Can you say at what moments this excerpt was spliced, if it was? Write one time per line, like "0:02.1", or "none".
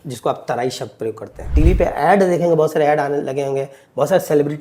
0:01.5

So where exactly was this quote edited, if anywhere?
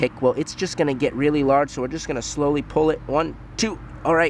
none

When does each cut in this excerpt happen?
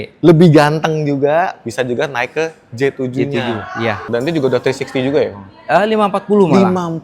0:04.0

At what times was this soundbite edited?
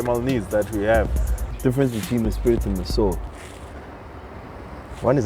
0:01.4

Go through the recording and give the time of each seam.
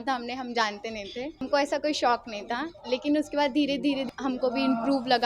0:01.5
0:04.1

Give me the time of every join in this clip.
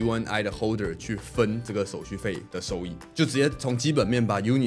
none

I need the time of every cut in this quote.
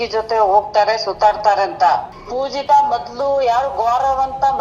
0:02.1

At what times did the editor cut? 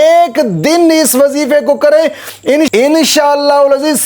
0:02.7

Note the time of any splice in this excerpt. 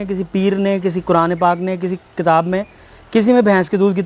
none

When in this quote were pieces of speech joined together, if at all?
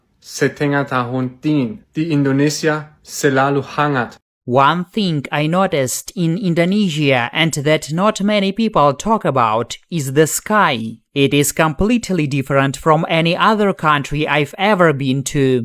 0:04.2

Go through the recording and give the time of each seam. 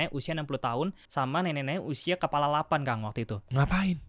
0:01.0

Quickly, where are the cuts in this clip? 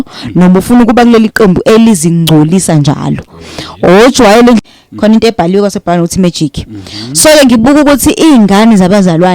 0:04.6

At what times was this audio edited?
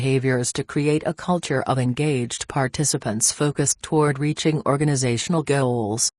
0:05.3

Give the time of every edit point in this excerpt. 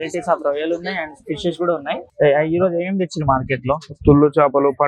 0:02.0

